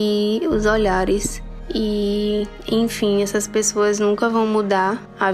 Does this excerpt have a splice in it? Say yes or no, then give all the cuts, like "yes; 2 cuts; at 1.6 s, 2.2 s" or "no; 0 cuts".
yes; 1 cut; at 1.5 s